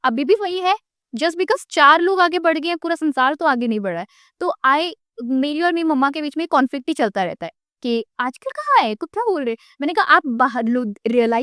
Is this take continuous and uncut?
yes; 0 cuts

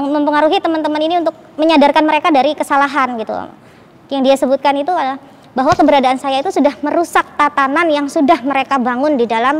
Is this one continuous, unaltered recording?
yes; 0 cuts

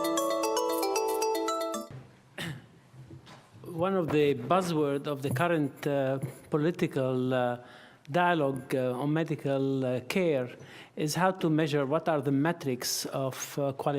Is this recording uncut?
no; 1 cut; at 1.5 s

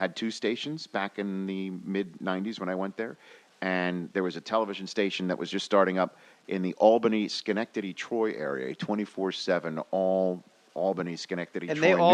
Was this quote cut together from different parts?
yes; 1 cut; at 6.8 s

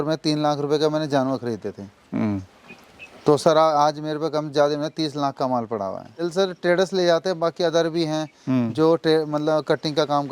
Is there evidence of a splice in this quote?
yes; 1 cut; at 6.2 s

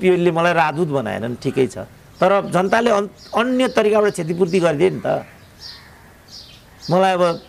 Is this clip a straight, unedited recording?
yes; 0 cuts

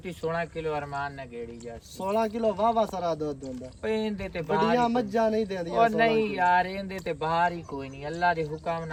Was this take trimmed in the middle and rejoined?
no; 0 cuts

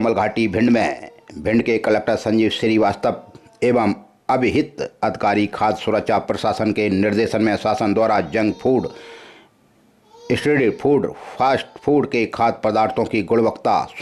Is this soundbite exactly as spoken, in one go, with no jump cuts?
yes; 0 cuts

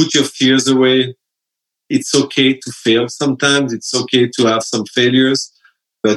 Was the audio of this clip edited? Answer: no; 0 cuts

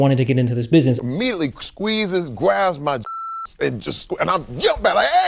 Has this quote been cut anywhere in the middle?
yes; 1 cut; at 1.0 s

